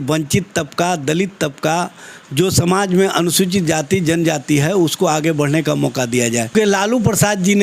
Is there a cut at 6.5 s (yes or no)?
yes